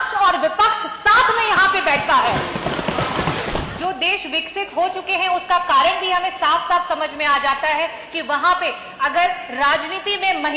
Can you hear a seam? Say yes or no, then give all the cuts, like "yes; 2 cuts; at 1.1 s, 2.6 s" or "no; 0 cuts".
yes; 1 cut; at 3.7 s